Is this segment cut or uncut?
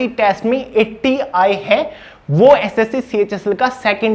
uncut